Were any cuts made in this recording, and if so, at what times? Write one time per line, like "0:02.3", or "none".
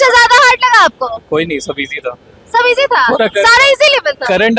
none